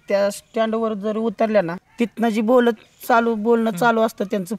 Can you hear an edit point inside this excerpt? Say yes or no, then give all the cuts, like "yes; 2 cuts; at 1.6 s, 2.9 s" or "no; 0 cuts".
no; 0 cuts